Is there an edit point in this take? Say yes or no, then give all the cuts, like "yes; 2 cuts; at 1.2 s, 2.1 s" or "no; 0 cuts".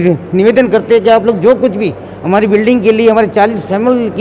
no; 0 cuts